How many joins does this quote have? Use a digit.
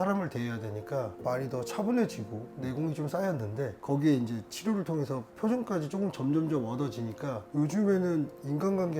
1